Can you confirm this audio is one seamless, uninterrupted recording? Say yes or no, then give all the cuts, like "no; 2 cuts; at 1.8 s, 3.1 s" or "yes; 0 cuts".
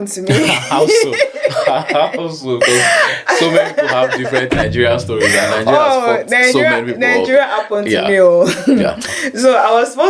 yes; 0 cuts